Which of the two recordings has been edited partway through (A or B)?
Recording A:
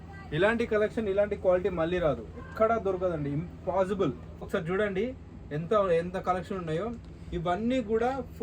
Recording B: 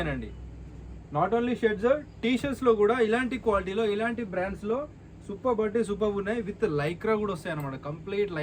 A